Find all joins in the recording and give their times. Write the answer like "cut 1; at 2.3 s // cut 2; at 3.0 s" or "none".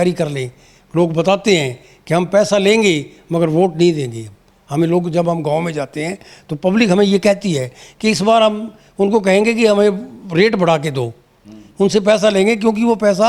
none